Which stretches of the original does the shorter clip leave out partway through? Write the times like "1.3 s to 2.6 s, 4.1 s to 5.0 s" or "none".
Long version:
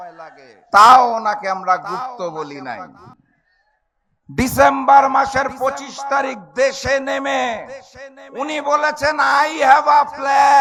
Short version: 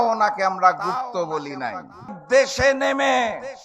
3.2 s to 6.4 s